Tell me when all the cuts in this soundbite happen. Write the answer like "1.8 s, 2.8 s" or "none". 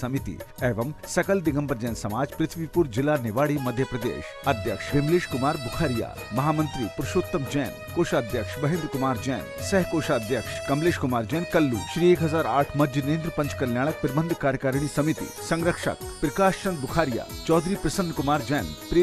none